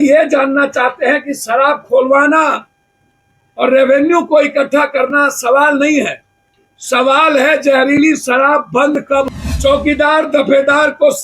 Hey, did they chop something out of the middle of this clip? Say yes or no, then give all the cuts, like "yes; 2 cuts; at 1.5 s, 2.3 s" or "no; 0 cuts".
yes; 1 cut; at 9.4 s